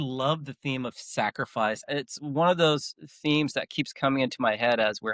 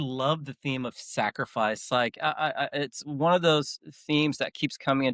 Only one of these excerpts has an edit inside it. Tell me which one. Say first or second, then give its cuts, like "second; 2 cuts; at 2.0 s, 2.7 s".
first; 1 cut; at 1.9 s